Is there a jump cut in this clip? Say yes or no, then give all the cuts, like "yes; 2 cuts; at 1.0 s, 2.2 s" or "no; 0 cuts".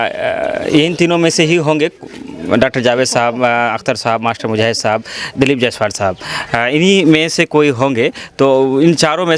no; 0 cuts